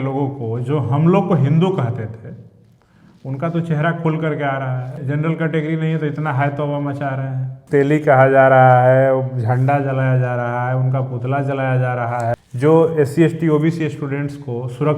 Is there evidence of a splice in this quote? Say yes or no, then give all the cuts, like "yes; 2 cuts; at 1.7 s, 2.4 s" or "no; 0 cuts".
yes; 3 cuts; at 4.9 s, 7.5 s, 12.3 s